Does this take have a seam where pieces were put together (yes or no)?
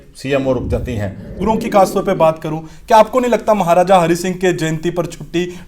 yes